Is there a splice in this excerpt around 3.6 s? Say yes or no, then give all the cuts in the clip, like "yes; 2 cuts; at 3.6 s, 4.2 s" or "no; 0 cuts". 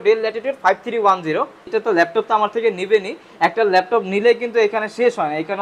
no; 1 cut; at 1.7 s